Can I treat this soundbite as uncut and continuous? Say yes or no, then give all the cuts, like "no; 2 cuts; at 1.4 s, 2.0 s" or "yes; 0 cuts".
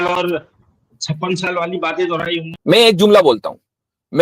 no; 1 cut; at 2.5 s